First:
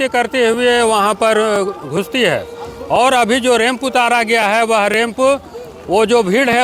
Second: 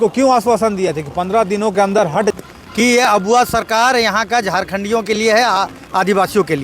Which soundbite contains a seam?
second; 1 cut; at 2.3 s

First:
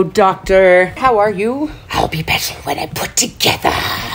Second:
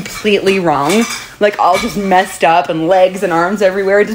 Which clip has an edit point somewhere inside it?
first; 2 cuts; at 0.9 s, 1.8 s

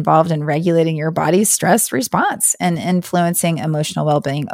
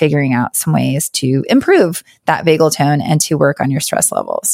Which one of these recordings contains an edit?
second; 1 cut; at 1.4 s

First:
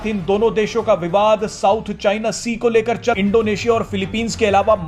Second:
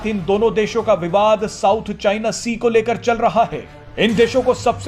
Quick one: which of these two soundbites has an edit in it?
first; 1 cut; at 3.2 s

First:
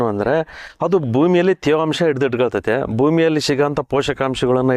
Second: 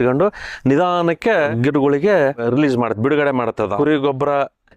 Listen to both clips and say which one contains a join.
second; 3 cuts; at 1.5 s, 2.4 s, 3.7 s

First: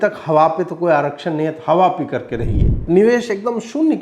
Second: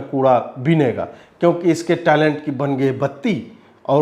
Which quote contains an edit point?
first; 1 cut; at 2.8 s

